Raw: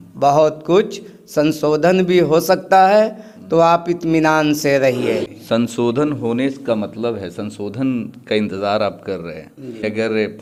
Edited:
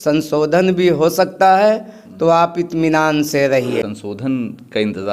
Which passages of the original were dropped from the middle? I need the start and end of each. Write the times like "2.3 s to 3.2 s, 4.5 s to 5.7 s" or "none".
5.2 s to 7.4 s